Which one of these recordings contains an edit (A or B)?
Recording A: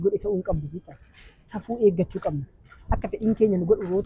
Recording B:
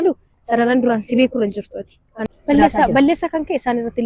B